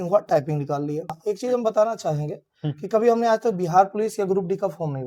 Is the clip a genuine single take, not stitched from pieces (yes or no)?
no